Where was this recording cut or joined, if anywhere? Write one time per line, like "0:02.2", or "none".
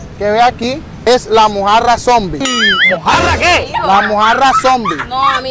0:01.1

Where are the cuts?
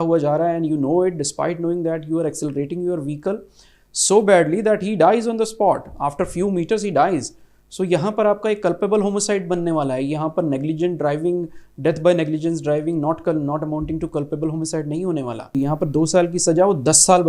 0:15.5

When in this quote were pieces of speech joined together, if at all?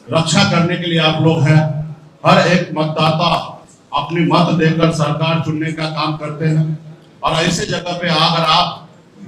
none

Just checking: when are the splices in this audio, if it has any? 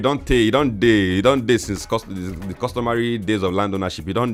none

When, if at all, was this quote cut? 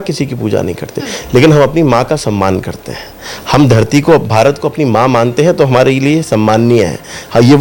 none

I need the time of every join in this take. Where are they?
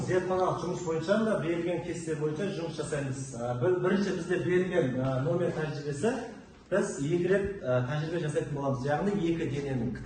none

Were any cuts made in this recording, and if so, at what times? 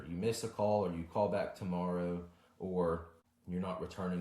none

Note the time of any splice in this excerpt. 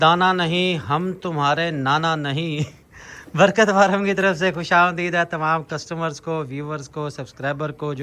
none

